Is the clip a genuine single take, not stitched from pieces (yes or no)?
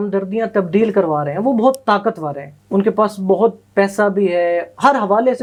yes